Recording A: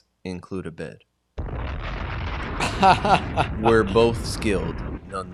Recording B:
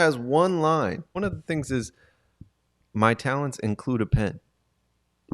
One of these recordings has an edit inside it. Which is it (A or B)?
B